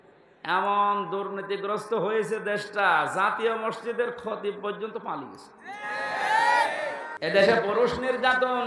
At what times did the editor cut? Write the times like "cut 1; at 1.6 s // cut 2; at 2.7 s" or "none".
cut 1; at 7.1 s